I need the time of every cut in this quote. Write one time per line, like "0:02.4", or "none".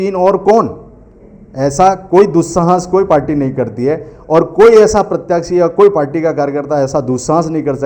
none